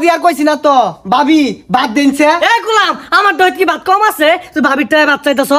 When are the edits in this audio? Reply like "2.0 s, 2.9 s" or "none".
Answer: none